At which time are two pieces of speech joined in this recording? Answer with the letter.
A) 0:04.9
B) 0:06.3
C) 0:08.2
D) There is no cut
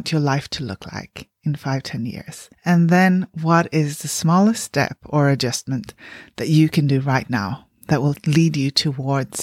C